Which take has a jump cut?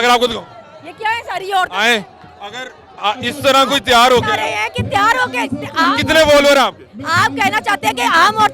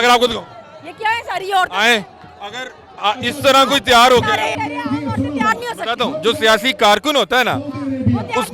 second; 1 cut; at 4.6 s

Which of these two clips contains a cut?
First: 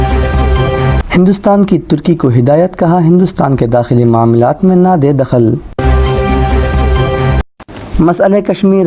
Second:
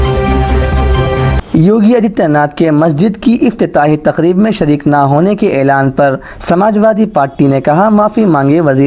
first; 2 cuts; at 5.8 s, 7.2 s

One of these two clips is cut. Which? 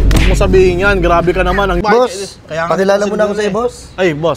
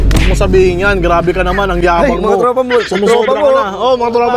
first; 1 cut; at 1.8 s

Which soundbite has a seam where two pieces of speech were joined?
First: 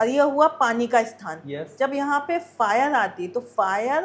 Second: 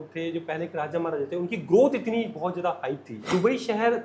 second; 1 cut; at 3.2 s

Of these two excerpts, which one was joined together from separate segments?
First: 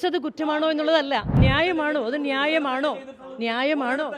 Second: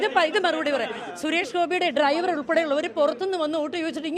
first; 1 cut; at 1.3 s

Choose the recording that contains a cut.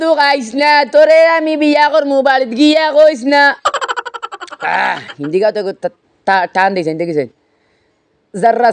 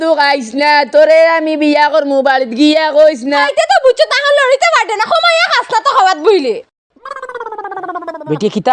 second; 1 cut; at 3.4 s

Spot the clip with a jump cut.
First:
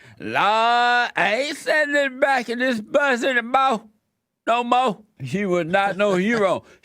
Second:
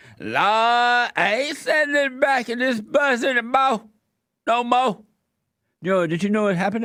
first; 1 cut; at 5.1 s

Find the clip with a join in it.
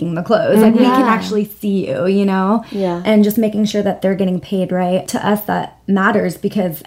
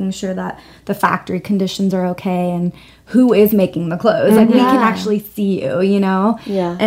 first; 1 cut; at 5.1 s

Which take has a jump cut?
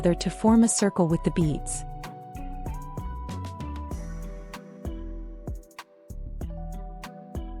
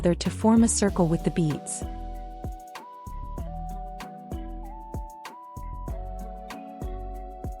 first; 3 cuts; at 1.6 s, 3.2 s, 5.5 s

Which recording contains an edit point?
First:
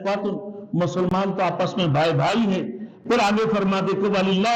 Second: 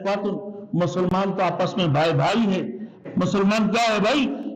second; 1 cut; at 2.9 s

